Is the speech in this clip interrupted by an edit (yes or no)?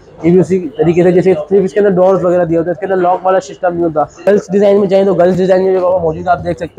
yes